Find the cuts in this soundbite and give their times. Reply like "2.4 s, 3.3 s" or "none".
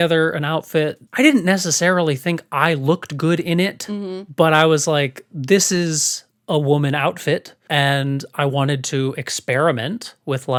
none